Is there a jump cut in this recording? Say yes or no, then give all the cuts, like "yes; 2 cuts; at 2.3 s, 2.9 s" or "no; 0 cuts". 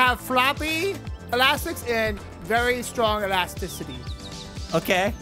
no; 0 cuts